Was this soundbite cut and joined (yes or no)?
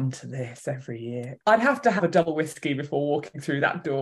yes